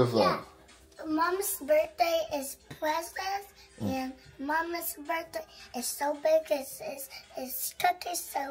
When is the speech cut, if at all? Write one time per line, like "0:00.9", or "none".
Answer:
none